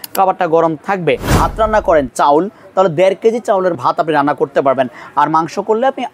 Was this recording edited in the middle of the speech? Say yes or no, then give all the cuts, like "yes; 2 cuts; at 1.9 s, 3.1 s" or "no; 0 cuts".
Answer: yes; 2 cuts; at 1.2 s, 3.8 s